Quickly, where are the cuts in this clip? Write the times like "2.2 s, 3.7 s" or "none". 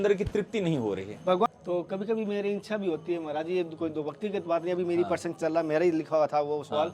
1.5 s